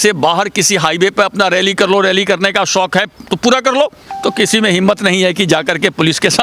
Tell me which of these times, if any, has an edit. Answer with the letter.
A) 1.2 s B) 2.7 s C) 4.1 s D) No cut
C